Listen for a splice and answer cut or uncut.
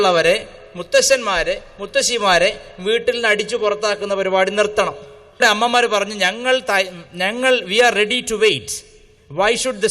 cut